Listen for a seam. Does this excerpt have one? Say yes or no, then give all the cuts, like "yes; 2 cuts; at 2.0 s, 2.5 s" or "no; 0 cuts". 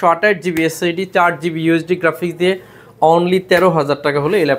no; 0 cuts